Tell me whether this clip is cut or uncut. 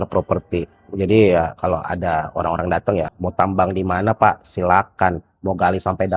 cut